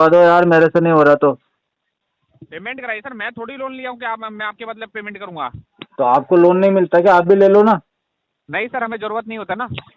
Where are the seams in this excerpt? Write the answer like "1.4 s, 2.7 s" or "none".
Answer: none